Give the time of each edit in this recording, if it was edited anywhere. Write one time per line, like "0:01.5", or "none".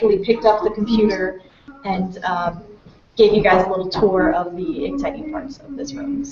0:04.3